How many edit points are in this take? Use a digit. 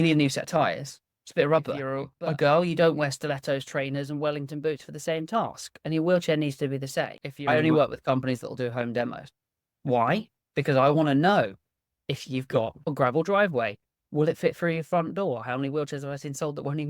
2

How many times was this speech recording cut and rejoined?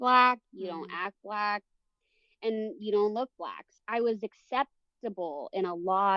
1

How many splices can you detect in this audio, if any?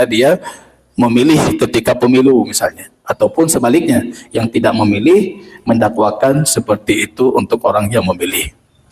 0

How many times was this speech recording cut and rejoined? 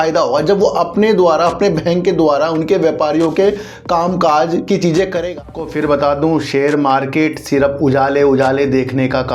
1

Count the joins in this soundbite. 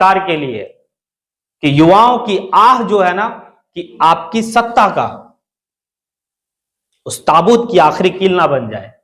1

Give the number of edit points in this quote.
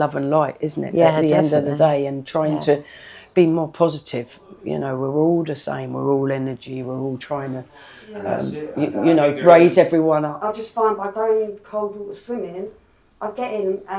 1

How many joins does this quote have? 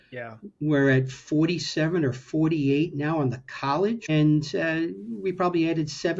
1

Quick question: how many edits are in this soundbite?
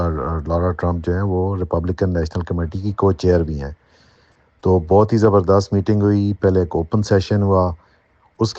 1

